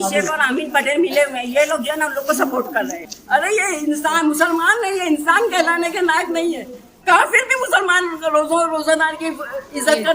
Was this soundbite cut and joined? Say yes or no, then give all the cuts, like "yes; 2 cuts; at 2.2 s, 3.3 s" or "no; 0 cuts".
yes; 1 cut; at 3.1 s